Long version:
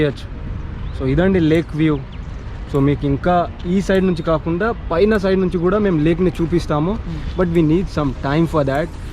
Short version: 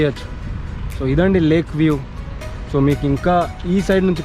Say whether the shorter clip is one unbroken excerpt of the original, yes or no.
yes